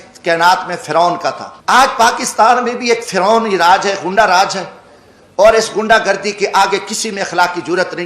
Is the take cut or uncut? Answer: cut